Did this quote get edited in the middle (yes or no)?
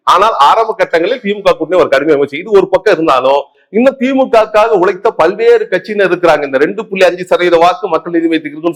no